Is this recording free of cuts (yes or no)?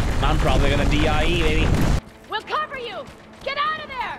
no